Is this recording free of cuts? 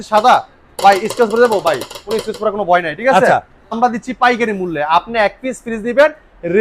no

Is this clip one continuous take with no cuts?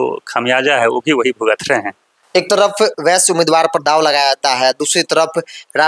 yes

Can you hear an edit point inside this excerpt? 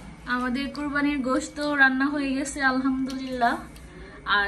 no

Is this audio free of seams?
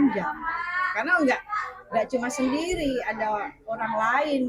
yes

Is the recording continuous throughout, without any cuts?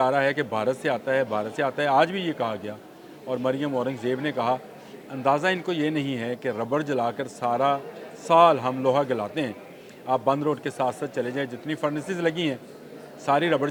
yes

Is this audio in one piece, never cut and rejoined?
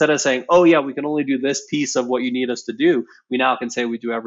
yes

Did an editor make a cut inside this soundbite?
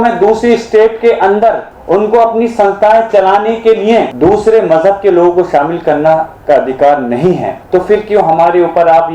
yes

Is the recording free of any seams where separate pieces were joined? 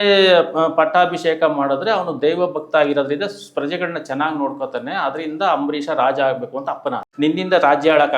no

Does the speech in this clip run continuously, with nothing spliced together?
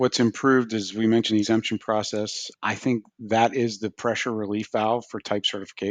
no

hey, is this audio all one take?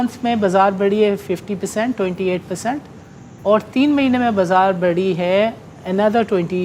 yes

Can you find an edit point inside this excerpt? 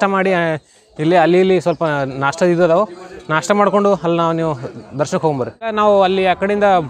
yes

